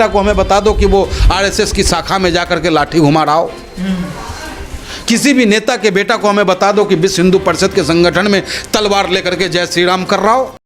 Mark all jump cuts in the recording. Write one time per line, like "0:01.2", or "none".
none